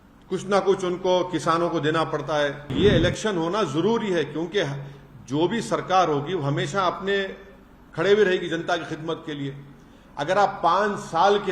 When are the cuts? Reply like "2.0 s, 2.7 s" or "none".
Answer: 2.7 s